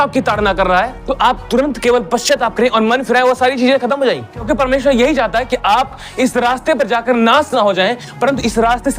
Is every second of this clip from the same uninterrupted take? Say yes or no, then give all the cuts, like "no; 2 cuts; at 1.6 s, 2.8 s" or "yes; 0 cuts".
no; 2 cuts; at 1.0 s, 4.4 s